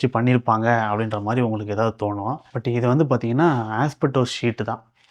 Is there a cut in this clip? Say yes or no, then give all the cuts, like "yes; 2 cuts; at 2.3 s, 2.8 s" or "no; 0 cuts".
yes; 1 cut; at 2.5 s